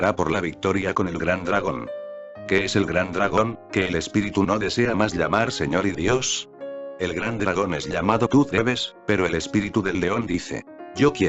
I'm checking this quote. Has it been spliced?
yes; 1 cut; at 8.5 s

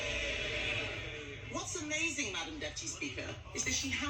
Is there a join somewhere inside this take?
no; 0 cuts

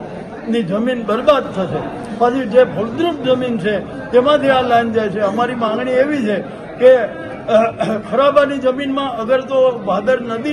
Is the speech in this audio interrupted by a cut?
no; 0 cuts

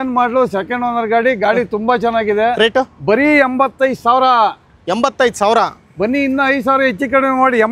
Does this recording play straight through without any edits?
yes; 0 cuts

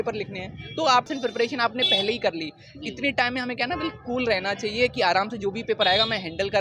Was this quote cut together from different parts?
yes; 1 cut; at 1.1 s

